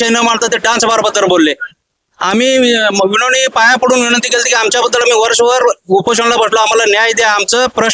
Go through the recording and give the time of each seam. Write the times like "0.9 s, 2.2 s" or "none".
1.7 s